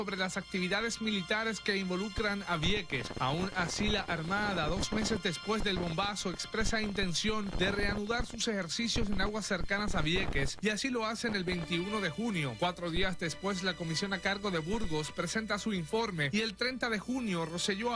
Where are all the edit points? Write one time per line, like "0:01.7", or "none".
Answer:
0:10.8